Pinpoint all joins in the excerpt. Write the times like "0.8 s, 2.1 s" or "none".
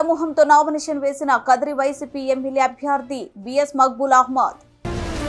none